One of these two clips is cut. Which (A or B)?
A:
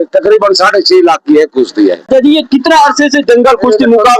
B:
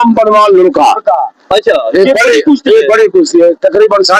A